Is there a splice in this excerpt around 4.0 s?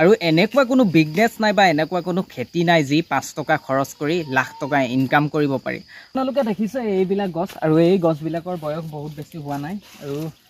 no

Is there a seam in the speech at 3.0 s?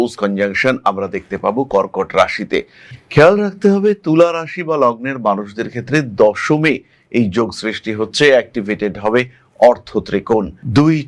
yes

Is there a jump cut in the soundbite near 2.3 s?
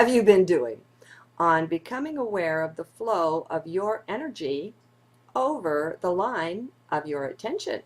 no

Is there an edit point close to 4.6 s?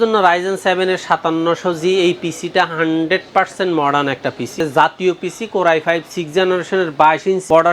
yes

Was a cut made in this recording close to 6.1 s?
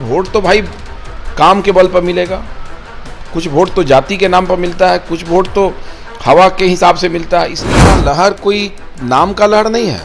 no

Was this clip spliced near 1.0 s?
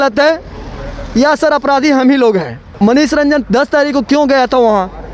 no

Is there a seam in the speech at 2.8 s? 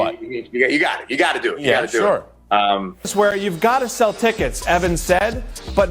yes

